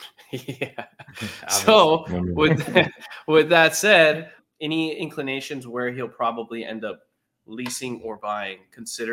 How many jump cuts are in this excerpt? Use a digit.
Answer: 1